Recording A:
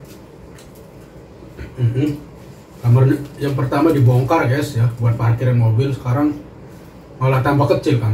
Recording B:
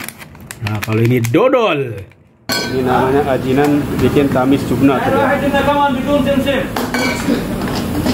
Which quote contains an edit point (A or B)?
B